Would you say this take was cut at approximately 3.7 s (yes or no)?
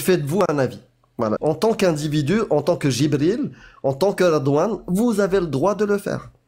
no